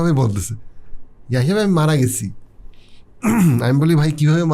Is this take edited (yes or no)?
no